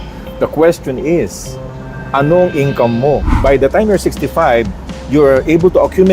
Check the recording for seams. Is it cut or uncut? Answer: cut